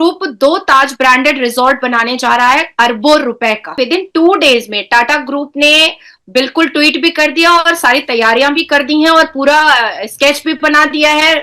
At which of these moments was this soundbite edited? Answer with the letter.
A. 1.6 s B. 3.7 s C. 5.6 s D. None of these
B